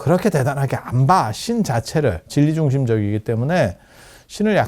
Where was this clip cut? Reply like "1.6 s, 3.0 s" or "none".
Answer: 2.3 s

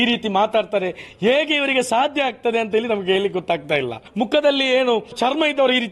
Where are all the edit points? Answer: 4.0 s, 5.1 s

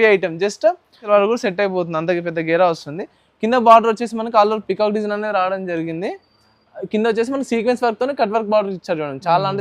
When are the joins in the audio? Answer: 1.0 s

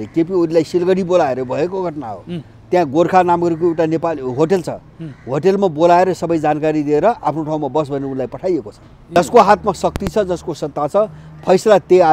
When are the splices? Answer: 9.1 s

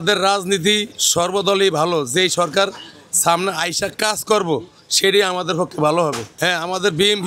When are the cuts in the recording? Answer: none

